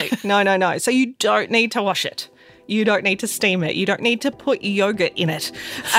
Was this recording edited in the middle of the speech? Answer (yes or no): no